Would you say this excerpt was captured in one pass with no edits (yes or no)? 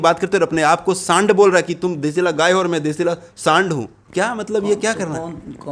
yes